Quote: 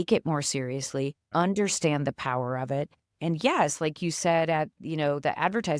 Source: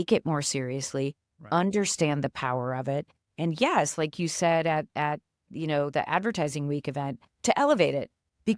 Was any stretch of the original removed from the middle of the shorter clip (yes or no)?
yes